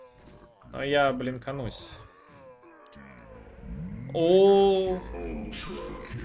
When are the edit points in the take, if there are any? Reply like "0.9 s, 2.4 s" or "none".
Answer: none